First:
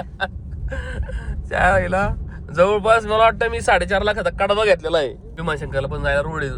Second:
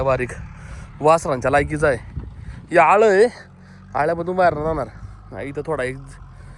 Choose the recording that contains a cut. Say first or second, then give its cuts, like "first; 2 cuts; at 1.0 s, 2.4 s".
first; 1 cut; at 5.3 s